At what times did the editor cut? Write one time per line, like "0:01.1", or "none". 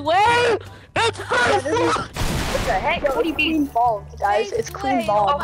none